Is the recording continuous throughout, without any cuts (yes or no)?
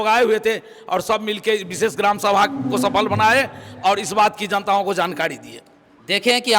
yes